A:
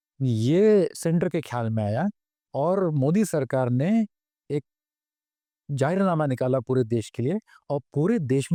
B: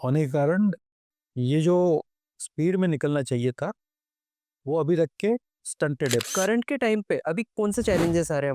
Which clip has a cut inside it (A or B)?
B